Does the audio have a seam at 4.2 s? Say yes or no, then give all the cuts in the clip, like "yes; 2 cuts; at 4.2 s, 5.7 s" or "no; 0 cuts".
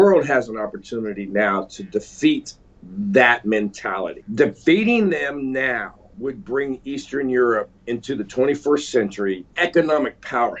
yes; 4 cuts; at 4.2 s, 6.0 s, 7.8 s, 9.5 s